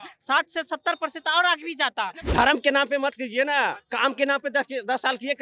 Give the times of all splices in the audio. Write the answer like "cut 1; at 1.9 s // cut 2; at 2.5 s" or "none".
cut 1; at 2.2 s